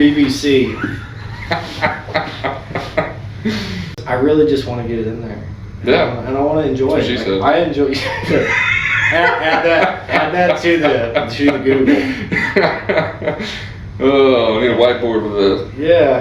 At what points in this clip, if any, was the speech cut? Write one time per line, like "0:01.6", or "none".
0:04.0